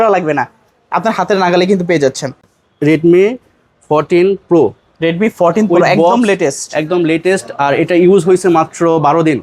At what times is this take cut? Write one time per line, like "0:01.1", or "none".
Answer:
0:02.5